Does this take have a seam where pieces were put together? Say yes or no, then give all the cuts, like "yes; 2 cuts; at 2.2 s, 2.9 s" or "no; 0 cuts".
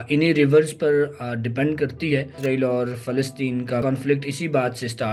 yes; 2 cuts; at 2.3 s, 3.8 s